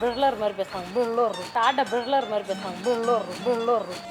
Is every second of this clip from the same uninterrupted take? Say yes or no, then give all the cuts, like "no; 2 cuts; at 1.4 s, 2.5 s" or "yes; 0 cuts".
yes; 0 cuts